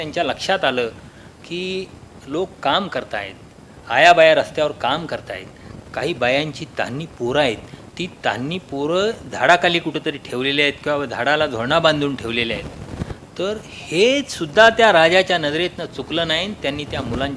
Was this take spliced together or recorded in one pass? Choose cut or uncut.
uncut